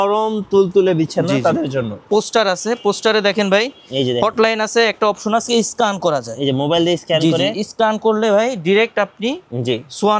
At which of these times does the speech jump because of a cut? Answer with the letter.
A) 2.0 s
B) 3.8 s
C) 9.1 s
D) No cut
A